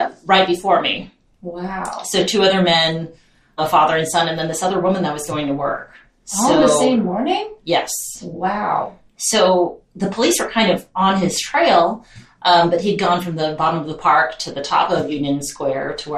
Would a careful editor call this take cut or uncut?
cut